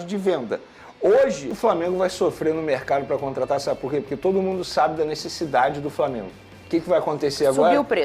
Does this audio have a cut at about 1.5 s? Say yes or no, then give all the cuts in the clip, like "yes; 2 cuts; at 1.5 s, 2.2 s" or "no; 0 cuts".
yes; 1 cut; at 1.5 s